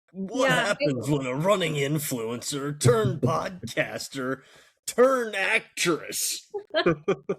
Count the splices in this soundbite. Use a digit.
0